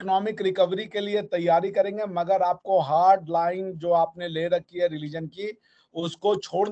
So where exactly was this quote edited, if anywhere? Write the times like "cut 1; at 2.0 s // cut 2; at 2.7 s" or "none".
none